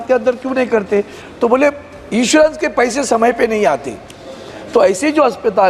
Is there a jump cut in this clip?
no; 0 cuts

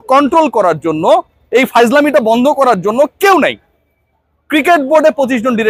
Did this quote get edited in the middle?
no; 0 cuts

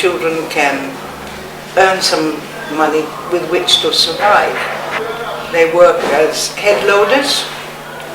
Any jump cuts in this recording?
yes; 1 cut; at 5.0 s

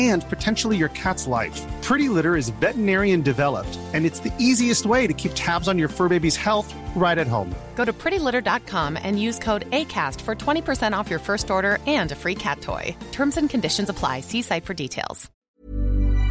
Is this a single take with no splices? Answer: no; 1 cut; at 15.3 s

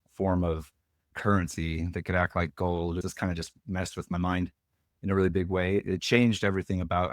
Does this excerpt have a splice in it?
yes; 1 cut; at 3.0 s

